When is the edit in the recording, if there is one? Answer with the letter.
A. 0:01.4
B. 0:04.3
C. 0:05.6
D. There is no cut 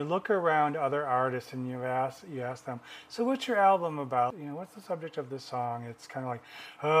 B